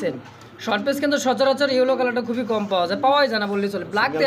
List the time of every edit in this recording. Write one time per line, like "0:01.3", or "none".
none